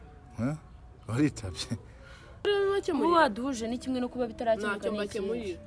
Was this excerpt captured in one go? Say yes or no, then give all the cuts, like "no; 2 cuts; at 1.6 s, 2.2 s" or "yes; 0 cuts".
no; 1 cut; at 2.4 s